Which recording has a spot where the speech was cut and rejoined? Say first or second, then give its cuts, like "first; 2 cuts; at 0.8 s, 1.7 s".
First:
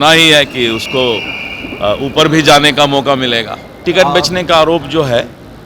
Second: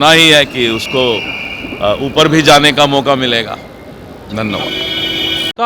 first; 1 cut; at 3.7 s